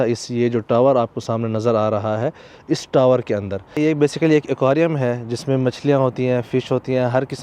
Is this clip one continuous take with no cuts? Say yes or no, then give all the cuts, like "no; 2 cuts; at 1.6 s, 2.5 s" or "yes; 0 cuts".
no; 1 cut; at 3.8 s